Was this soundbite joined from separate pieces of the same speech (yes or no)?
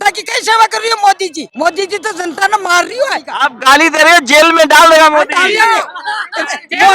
yes